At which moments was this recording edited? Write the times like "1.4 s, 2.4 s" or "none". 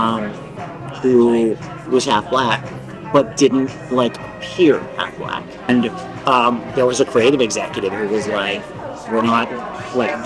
5.7 s